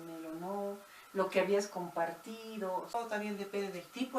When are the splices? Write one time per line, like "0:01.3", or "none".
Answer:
0:02.9